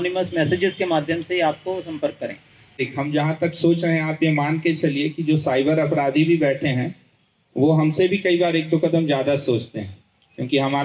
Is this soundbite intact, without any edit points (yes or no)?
no